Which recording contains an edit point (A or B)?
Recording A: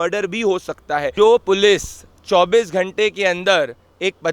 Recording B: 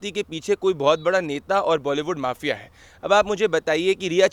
A